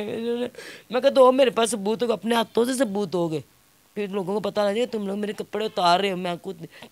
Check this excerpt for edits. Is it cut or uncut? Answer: uncut